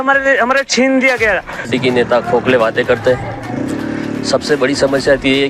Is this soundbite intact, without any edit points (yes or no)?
no